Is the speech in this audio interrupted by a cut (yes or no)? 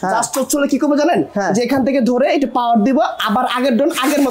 no